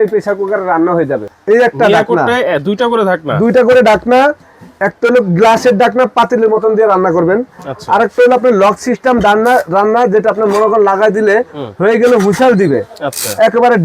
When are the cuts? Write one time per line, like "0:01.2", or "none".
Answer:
0:01.3

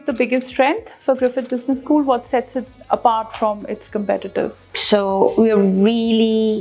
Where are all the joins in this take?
0:04.8

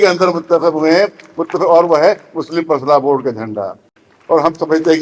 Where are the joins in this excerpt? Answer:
none

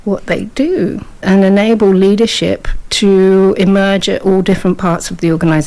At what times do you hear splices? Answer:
none

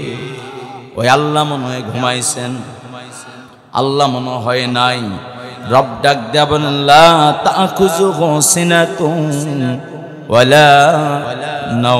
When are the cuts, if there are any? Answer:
none

